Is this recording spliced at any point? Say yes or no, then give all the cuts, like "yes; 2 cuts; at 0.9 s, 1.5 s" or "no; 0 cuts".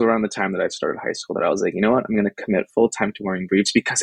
no; 0 cuts